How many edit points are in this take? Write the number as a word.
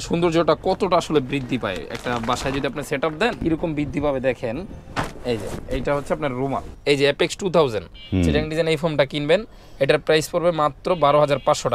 two